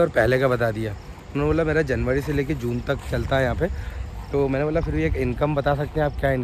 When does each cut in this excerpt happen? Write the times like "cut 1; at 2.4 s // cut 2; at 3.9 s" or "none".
none